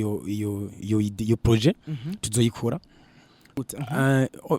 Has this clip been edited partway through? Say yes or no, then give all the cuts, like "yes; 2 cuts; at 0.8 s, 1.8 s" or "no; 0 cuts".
yes; 1 cut; at 3.6 s